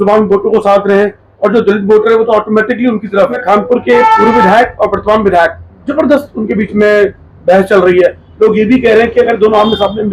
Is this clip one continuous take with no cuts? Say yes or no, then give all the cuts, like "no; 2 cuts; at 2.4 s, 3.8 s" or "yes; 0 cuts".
no; 1 cut; at 3.4 s